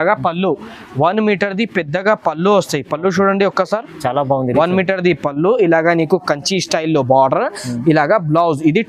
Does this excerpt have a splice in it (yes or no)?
no